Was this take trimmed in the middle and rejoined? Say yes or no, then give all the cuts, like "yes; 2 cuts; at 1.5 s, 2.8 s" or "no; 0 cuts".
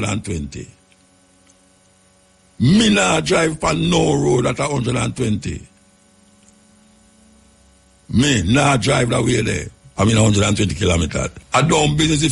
yes; 2 cuts; at 9.8 s, 11.4 s